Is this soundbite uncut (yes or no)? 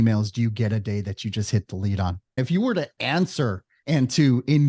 no